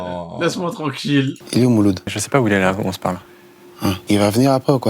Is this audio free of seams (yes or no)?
no